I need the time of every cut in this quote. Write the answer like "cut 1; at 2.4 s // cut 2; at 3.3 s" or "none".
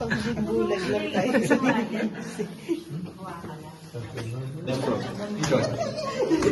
cut 1; at 4.7 s